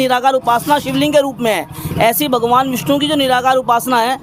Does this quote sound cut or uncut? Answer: uncut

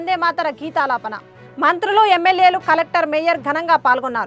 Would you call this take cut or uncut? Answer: uncut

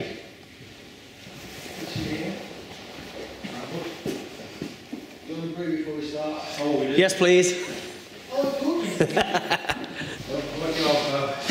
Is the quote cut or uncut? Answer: uncut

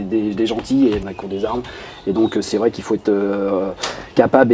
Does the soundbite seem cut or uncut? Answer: cut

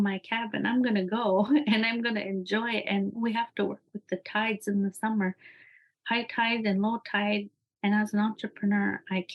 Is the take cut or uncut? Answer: cut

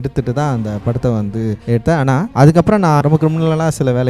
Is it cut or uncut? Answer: cut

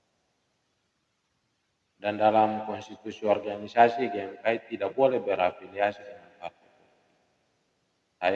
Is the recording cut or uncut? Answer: uncut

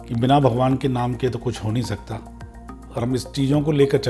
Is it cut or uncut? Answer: uncut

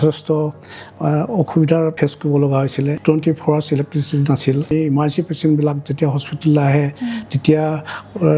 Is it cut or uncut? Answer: cut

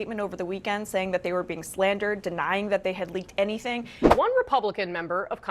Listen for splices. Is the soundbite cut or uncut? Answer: cut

